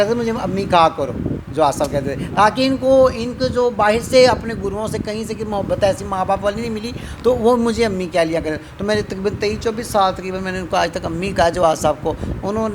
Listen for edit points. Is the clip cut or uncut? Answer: uncut